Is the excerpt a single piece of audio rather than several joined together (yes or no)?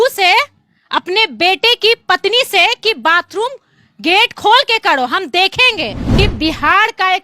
no